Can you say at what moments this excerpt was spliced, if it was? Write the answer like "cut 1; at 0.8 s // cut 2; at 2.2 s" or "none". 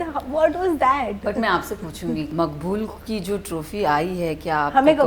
cut 1; at 2.3 s